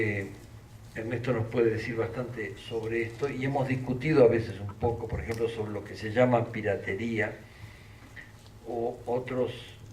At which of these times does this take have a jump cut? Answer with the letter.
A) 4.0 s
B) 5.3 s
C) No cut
A